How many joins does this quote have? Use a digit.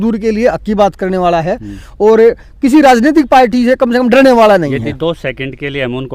0